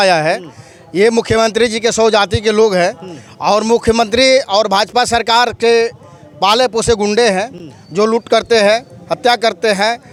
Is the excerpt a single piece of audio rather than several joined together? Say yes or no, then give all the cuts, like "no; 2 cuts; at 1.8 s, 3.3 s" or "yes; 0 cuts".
yes; 0 cuts